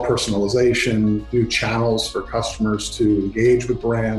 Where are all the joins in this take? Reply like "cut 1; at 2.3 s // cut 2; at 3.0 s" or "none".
none